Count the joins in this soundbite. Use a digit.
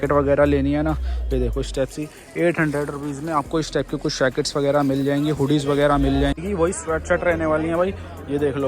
1